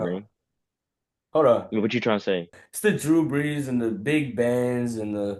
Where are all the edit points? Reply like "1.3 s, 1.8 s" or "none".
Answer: 2.6 s